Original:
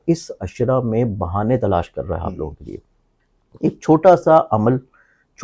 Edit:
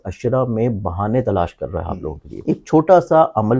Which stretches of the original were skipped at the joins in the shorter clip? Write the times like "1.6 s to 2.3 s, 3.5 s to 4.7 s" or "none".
2.6 s to 3.4 s